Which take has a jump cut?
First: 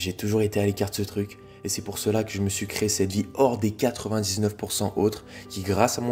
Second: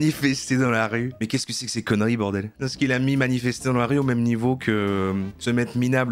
second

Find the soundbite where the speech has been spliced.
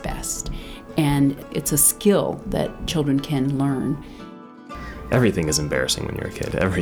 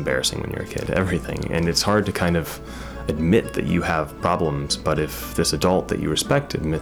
first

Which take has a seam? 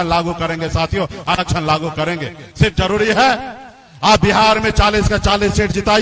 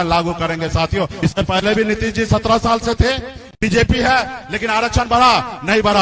second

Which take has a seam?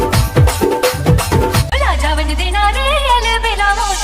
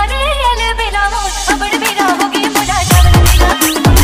first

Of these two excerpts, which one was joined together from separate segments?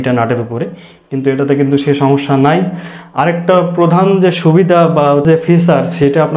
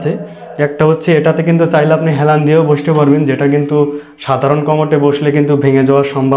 first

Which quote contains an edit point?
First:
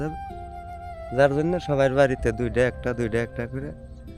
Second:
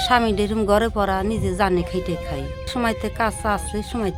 second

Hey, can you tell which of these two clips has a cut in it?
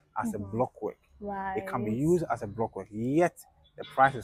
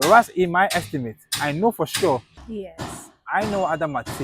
second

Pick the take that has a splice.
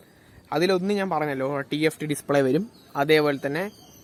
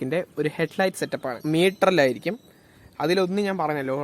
second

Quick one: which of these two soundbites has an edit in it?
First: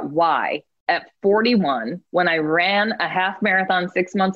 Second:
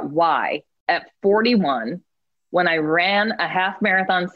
first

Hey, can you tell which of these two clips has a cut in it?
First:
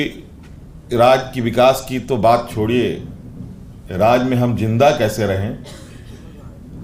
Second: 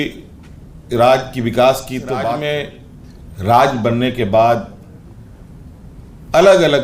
second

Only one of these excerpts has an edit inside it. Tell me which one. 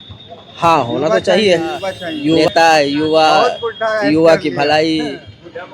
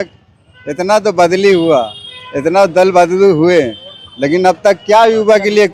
first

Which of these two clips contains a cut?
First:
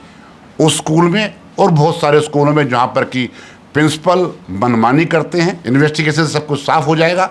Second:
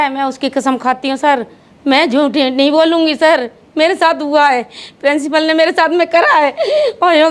first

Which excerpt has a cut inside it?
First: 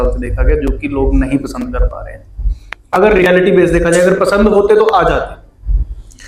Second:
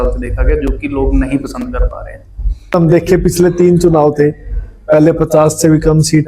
second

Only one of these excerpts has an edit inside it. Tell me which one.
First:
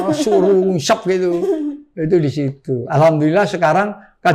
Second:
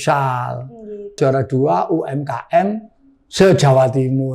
second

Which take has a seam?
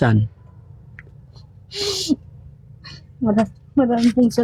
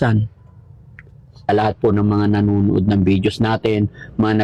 second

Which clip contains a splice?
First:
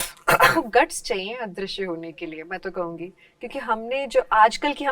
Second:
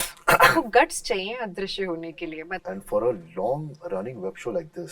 second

